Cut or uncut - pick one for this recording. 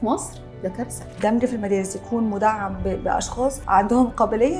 cut